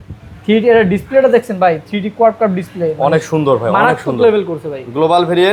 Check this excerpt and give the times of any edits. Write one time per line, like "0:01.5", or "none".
none